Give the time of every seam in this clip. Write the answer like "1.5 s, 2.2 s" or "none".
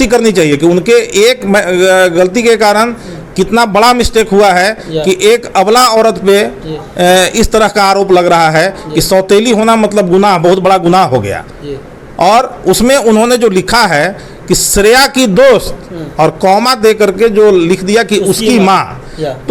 none